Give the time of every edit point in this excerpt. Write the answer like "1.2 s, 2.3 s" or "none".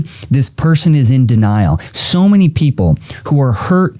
1.8 s